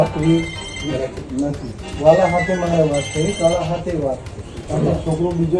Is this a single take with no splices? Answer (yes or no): no